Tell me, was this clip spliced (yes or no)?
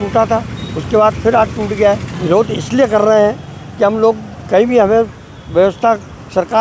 yes